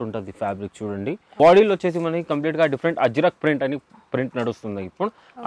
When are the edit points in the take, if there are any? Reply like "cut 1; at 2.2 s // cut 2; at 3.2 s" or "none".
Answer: cut 1; at 1.3 s